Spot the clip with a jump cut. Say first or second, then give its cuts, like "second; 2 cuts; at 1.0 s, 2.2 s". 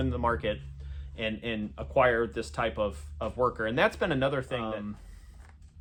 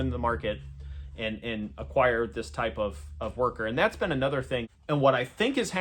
second; 1 cut; at 4.7 s